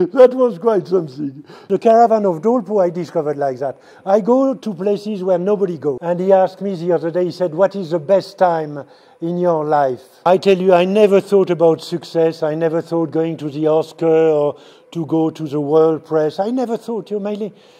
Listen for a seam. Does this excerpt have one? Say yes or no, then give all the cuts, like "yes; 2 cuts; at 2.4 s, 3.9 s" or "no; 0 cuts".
yes; 3 cuts; at 1.5 s, 6.0 s, 10.1 s